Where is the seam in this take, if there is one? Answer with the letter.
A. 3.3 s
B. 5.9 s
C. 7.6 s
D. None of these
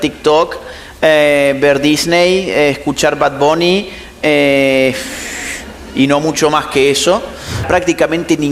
C